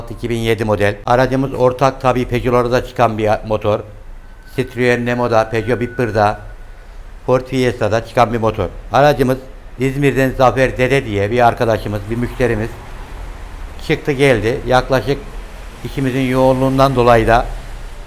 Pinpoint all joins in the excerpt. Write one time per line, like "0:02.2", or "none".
0:01.0